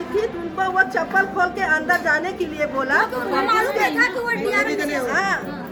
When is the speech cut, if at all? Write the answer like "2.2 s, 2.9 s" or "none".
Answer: none